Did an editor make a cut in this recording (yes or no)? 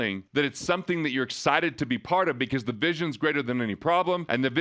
no